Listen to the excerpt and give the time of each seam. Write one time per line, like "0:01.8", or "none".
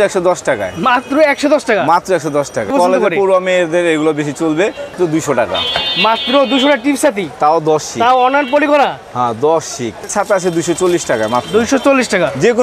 0:02.7
0:04.9
0:10.0